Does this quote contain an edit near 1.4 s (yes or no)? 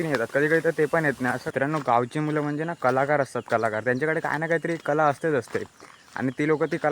yes